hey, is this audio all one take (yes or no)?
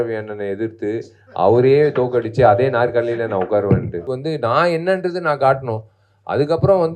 no